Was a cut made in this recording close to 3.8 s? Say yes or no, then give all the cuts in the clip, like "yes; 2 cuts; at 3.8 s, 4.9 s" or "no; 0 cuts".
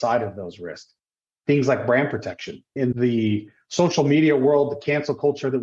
no; 0 cuts